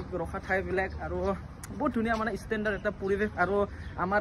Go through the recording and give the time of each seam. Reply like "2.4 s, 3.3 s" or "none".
none